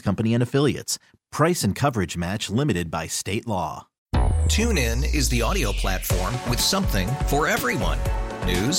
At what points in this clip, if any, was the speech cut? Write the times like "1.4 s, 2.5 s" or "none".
3.9 s